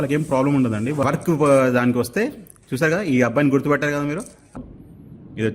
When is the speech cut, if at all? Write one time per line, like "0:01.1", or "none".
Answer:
0:01.0
0:04.6